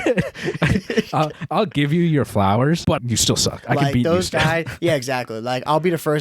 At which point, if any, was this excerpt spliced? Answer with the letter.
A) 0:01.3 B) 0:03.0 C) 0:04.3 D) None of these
B